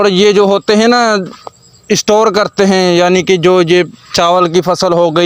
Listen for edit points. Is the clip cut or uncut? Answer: uncut